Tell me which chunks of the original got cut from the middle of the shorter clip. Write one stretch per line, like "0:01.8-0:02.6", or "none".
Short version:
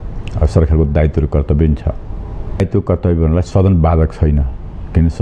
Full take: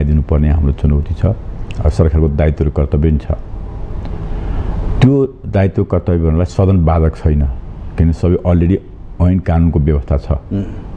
0:04.0-0:05.6